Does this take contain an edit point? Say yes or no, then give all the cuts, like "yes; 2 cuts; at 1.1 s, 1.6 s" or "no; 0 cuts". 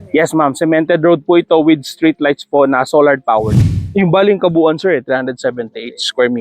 yes; 1 cut; at 3.8 s